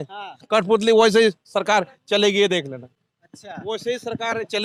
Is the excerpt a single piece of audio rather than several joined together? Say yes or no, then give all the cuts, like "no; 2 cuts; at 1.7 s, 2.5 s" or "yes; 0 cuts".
yes; 0 cuts